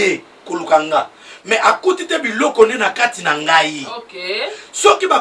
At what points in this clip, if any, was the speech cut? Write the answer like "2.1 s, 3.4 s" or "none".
none